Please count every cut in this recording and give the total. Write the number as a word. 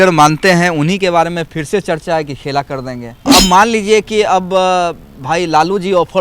one